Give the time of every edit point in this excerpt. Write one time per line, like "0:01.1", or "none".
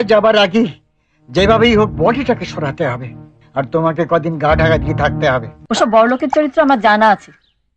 0:05.6